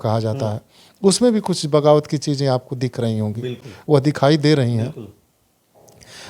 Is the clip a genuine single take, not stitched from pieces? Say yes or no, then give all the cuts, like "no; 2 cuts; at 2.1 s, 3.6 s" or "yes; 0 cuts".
yes; 0 cuts